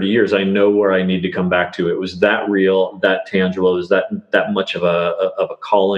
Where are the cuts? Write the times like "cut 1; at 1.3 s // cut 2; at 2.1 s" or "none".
none

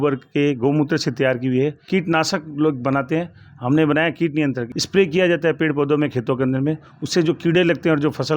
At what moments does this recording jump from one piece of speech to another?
cut 1; at 1.8 s // cut 2; at 4.7 s

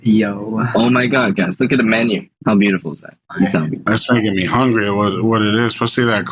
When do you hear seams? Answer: cut 1; at 2.3 s // cut 2; at 3.8 s

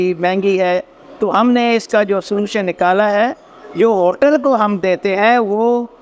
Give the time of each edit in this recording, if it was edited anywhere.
none

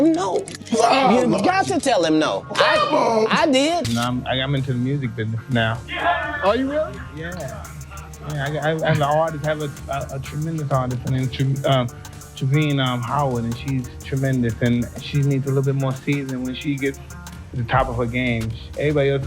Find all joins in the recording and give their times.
cut 1; at 3.8 s

